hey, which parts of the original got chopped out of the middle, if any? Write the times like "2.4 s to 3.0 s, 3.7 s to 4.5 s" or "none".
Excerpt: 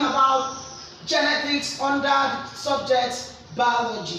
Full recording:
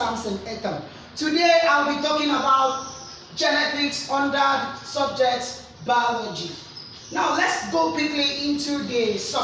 none